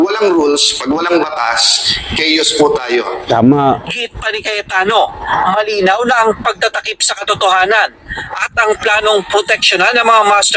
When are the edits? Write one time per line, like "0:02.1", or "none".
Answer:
none